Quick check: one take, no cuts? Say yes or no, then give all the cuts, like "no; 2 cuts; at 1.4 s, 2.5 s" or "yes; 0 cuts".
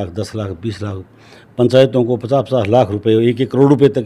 yes; 0 cuts